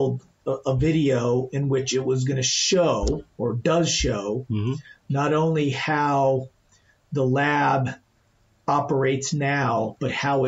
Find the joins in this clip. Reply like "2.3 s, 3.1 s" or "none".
none